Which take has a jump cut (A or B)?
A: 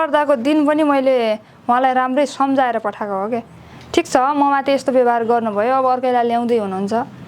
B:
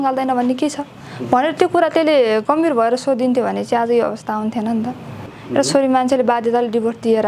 B